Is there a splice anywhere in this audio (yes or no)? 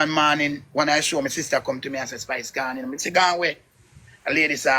no